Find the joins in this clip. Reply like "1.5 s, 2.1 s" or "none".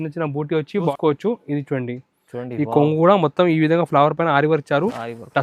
0.9 s